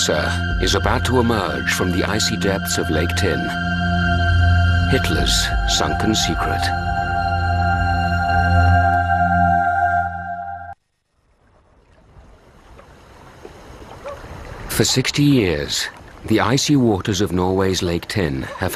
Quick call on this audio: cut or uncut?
cut